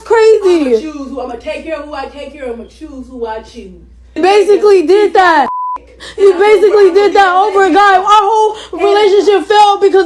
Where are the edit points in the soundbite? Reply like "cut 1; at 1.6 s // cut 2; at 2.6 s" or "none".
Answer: cut 1; at 4.0 s